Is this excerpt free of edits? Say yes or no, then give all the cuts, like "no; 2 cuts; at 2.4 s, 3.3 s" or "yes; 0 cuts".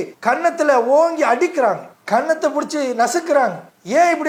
yes; 0 cuts